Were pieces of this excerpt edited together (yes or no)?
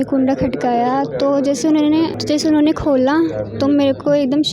yes